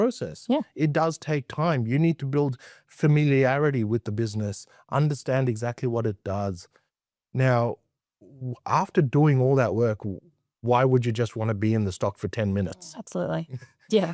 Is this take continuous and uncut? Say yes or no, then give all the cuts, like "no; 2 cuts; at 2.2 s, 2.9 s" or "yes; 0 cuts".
yes; 0 cuts